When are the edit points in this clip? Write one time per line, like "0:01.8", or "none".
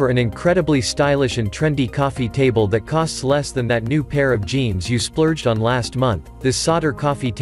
none